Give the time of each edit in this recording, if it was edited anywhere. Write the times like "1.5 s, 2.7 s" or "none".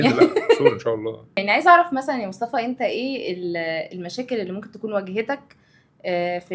1.3 s